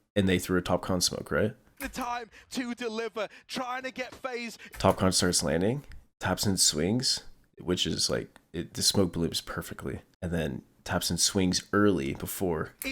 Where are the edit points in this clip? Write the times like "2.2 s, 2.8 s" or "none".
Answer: 10.1 s

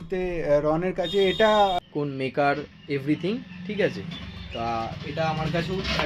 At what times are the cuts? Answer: 1.8 s

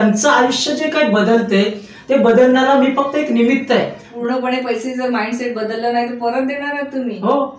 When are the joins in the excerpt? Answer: 4.1 s

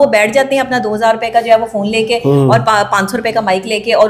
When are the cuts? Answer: none

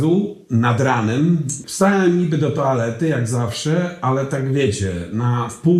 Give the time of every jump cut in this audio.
1.6 s

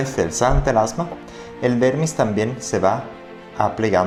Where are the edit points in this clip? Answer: none

